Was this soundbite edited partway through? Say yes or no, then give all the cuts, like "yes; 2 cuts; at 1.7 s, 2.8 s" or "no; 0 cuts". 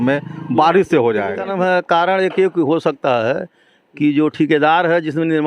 yes; 1 cut; at 1.5 s